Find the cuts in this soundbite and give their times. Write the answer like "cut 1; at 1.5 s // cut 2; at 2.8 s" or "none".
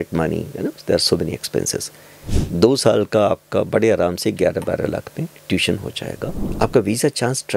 cut 1; at 1.9 s // cut 2; at 6.5 s